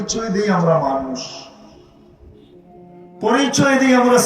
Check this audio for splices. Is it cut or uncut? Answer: cut